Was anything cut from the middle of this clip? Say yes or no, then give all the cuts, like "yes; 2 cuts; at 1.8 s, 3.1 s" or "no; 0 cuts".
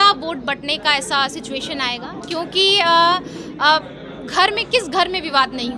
no; 0 cuts